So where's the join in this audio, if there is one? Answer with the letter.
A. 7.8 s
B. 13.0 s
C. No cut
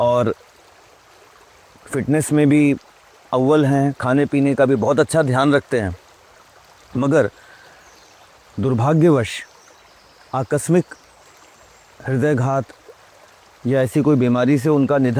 C